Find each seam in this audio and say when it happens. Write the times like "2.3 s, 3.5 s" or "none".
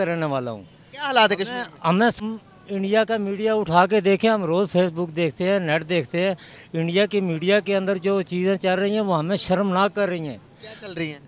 2.2 s